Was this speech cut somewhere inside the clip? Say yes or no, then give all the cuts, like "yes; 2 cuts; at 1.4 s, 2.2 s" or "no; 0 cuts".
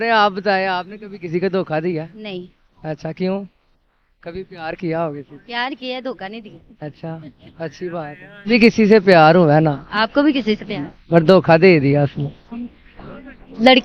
no; 0 cuts